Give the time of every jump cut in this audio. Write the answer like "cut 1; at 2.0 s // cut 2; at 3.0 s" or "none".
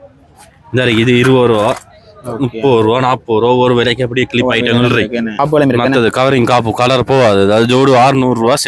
cut 1; at 5.4 s